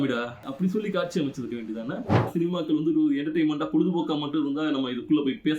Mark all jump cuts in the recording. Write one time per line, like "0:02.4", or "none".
0:02.3